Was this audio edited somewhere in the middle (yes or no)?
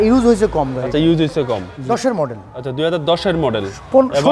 yes